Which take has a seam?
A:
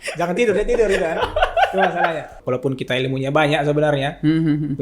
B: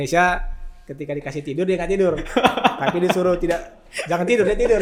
A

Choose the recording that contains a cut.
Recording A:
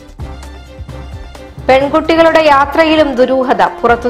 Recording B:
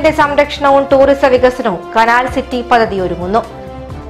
A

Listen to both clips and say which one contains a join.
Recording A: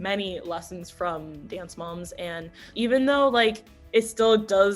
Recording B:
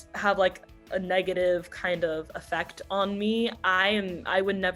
A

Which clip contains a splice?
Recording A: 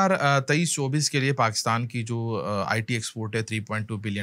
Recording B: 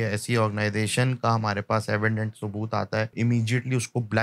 B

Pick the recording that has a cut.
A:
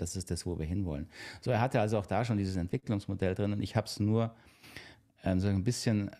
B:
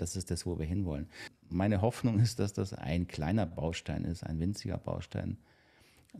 B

